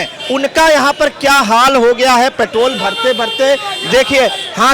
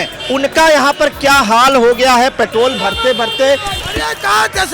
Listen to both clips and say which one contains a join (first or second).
second